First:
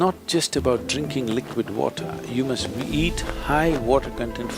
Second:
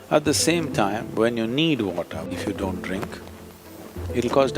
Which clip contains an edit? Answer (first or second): second